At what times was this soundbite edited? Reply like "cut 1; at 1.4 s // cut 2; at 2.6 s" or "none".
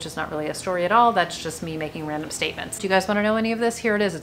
cut 1; at 2.8 s